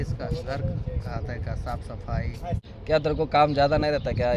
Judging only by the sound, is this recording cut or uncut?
cut